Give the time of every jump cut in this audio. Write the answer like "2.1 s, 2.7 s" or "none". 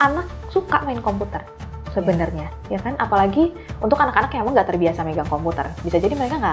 none